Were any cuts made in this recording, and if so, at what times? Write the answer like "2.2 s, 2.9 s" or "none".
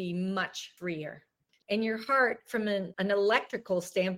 1.1 s, 2.9 s